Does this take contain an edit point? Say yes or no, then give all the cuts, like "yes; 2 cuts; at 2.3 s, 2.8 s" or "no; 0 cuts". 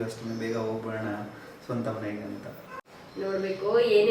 yes; 1 cut; at 2.7 s